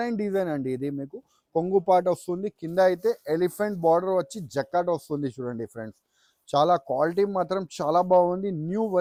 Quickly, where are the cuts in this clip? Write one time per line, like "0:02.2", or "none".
none